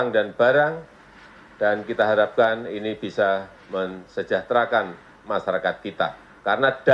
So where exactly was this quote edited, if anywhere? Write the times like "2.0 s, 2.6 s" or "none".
none